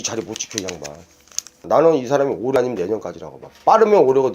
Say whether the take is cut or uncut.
cut